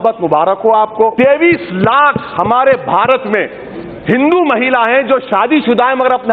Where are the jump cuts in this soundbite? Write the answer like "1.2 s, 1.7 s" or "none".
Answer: 1.1 s